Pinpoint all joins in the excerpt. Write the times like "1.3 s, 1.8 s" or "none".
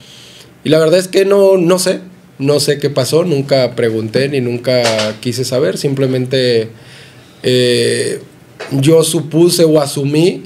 none